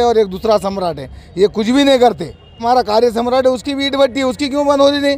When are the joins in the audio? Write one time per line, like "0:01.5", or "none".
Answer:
0:02.6

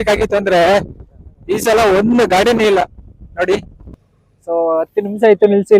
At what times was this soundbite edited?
0:04.0

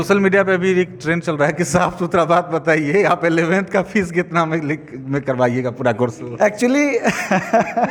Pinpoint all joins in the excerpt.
none

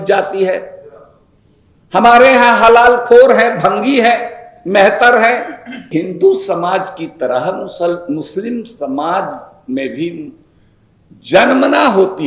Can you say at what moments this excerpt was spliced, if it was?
0:05.9

